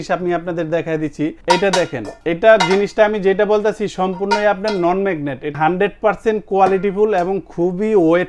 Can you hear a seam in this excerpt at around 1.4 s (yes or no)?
yes